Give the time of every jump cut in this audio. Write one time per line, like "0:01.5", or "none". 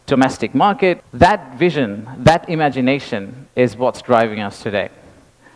0:01.1